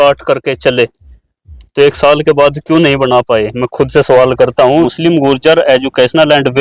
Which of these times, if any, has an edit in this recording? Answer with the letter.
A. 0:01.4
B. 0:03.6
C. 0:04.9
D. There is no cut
C